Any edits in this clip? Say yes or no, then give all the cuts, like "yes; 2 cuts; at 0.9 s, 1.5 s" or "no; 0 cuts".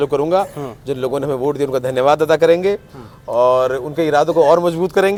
no; 0 cuts